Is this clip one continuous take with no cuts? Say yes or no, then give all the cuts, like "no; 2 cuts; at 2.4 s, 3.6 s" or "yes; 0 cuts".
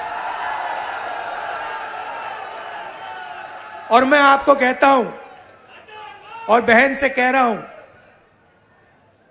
yes; 0 cuts